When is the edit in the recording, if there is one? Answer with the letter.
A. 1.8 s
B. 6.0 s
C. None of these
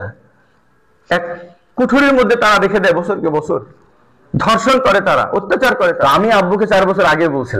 B